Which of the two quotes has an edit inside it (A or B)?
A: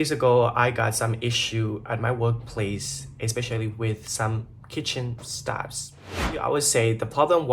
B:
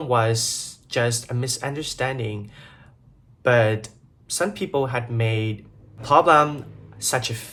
A